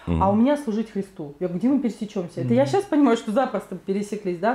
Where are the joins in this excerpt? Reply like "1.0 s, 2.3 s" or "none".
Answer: none